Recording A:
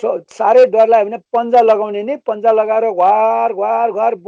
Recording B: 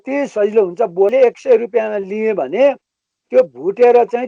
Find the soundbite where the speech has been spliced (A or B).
B